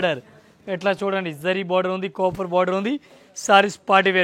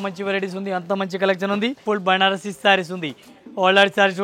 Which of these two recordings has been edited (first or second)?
second